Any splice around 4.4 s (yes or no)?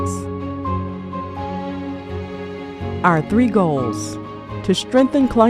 no